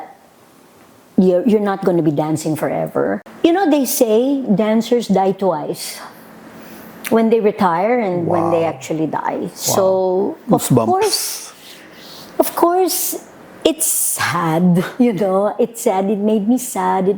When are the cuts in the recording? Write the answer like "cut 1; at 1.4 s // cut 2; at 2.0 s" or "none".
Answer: cut 1; at 3.3 s